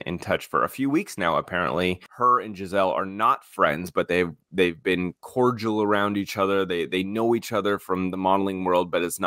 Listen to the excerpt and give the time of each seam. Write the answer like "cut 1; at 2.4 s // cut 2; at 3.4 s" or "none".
cut 1; at 2.1 s